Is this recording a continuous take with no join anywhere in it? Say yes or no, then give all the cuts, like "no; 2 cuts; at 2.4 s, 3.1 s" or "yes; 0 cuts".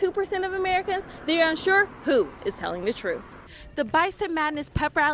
no; 1 cut; at 3.3 s